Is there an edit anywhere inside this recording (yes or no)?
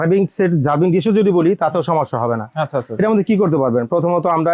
no